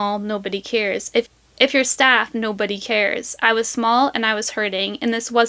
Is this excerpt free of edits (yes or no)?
yes